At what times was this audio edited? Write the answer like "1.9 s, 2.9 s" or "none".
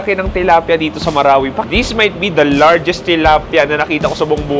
1.6 s